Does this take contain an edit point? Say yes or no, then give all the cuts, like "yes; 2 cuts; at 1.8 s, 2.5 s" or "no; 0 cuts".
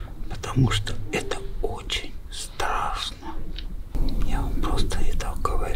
yes; 1 cut; at 3.9 s